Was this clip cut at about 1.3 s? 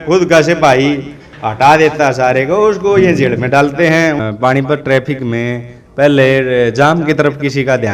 no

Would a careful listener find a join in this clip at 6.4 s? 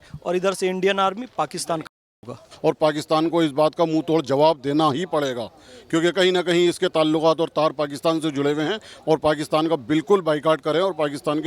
no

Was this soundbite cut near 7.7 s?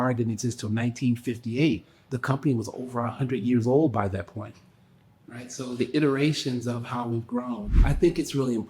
yes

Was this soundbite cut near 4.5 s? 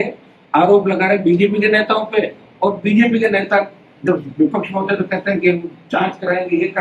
no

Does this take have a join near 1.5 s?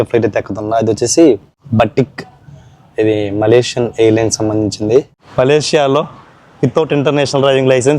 yes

